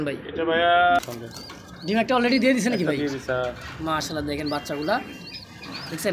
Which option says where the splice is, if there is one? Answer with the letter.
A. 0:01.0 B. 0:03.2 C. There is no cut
A